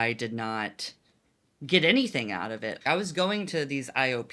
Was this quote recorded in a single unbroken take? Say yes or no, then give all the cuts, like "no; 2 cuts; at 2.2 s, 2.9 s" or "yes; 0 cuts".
no; 1 cut; at 2.7 s